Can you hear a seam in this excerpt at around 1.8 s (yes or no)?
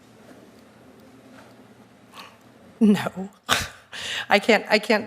yes